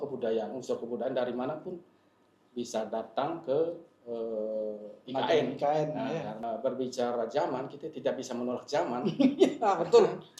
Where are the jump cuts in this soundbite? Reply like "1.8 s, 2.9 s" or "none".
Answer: 6.4 s